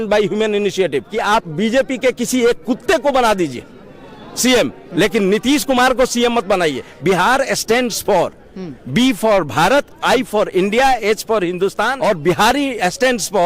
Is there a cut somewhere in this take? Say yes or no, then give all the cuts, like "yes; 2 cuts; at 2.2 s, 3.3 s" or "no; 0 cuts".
yes; 3 cuts; at 1.1 s, 6.9 s, 11.9 s